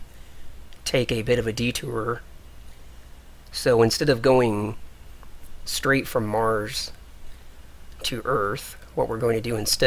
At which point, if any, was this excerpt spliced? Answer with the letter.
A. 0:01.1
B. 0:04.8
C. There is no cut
A